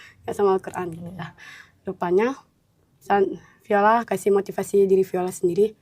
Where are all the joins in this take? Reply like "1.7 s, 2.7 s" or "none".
none

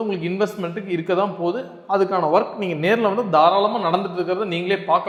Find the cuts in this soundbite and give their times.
none

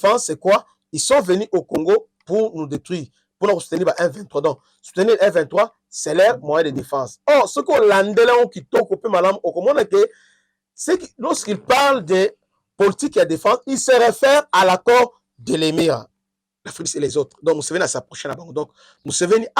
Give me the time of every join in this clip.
16.2 s

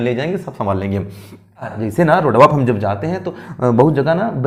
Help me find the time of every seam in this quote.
1.8 s

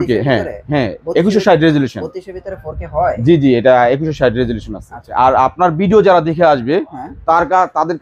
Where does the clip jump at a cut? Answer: 5.1 s

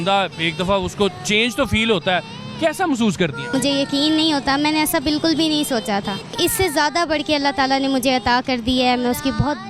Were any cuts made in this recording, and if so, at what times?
3.5 s, 6.3 s

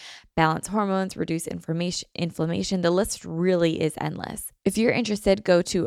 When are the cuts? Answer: 4.4 s

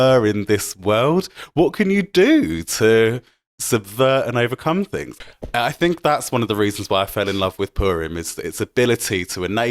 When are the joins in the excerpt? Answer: 5.0 s

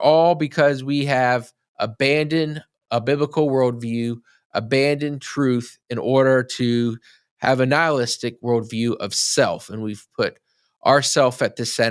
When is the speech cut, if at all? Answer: none

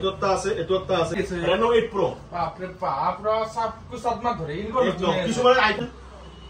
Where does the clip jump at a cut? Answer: 1.1 s, 5.8 s

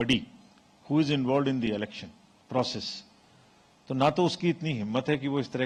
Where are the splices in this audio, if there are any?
none

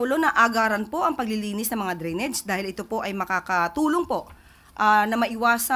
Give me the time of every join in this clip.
none

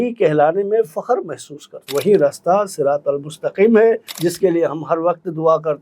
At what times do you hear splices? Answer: 1.9 s, 4.1 s

